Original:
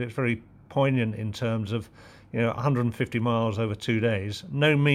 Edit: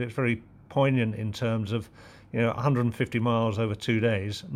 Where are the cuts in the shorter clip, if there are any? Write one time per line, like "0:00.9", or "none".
none

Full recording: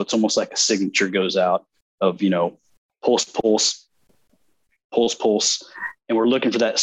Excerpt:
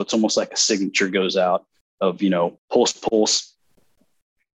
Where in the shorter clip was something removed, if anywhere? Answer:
0:02.6

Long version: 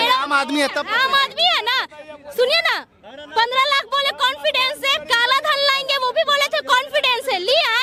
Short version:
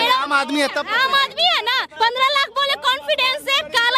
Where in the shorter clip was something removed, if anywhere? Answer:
0:01.9

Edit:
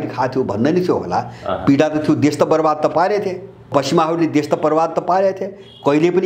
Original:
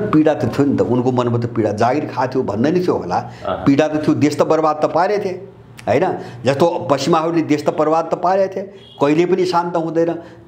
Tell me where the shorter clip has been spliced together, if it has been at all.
0:03.6

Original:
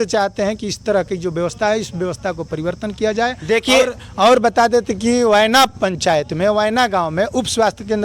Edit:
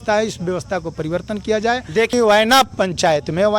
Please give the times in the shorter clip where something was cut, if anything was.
0:02.1

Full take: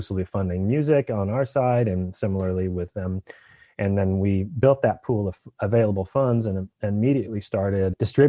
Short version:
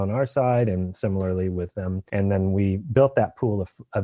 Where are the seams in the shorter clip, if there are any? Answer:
0:02.0

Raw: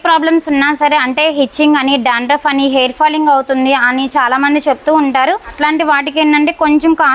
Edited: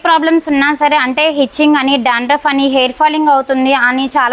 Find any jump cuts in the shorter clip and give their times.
none

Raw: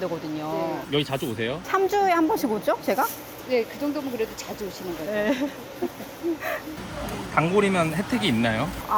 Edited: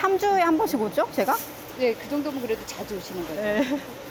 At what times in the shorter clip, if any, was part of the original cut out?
none

